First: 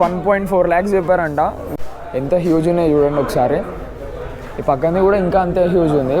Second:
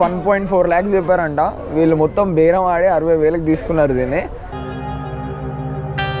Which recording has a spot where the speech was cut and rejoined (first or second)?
first